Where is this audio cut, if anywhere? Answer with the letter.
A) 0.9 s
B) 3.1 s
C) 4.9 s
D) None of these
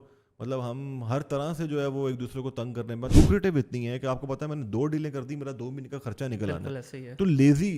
B